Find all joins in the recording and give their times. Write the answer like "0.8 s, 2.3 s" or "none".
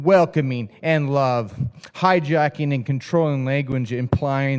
1.8 s